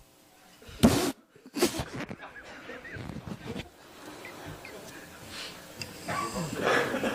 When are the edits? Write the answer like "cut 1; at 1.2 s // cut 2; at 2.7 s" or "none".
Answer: none